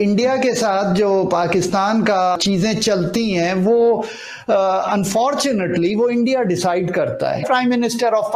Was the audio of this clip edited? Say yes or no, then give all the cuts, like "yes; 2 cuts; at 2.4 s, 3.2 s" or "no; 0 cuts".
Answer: yes; 2 cuts; at 2.4 s, 7.5 s